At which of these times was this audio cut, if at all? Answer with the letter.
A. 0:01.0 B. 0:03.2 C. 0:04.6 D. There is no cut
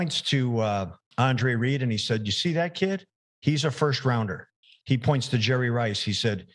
A